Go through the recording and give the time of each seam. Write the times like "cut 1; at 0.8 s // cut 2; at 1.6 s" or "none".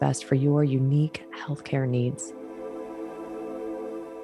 cut 1; at 2.2 s